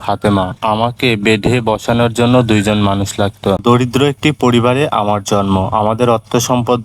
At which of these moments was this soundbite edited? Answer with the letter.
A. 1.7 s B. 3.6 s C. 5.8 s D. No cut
B